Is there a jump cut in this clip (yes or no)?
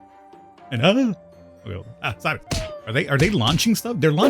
yes